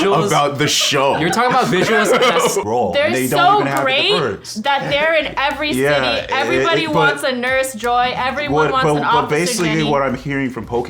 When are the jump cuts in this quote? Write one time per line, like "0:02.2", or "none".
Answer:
0:02.6